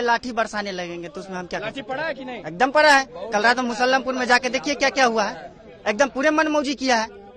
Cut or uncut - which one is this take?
uncut